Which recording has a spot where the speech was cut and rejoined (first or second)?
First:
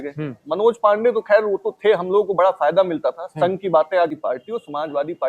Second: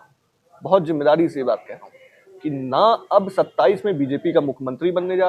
first